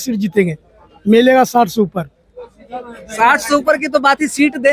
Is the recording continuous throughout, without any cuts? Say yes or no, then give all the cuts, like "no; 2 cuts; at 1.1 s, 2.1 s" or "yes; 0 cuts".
yes; 0 cuts